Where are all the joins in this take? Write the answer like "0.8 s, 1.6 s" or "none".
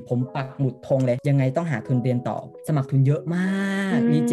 2.6 s